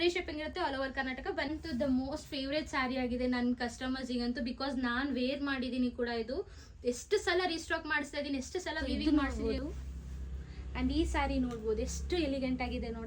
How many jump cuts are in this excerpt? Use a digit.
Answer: 2